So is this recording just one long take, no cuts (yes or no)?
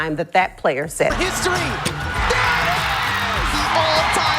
no